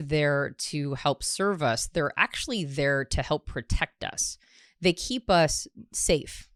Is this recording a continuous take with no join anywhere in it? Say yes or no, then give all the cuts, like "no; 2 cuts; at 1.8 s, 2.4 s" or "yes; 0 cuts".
yes; 0 cuts